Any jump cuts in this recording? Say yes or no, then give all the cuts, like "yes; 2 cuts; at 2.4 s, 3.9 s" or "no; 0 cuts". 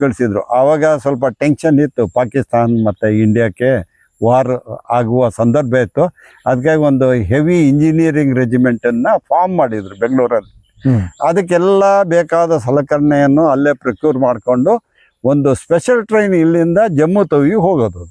no; 0 cuts